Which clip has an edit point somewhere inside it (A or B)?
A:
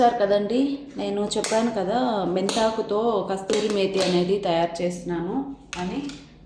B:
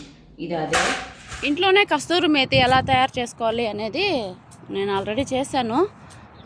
B